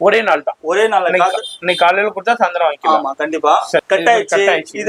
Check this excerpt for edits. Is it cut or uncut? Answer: cut